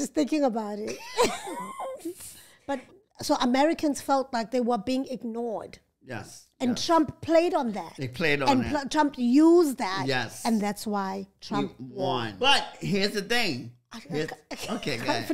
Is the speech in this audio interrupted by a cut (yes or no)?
yes